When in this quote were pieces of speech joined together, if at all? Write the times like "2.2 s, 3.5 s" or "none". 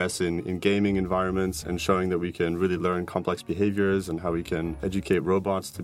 1.6 s, 4.8 s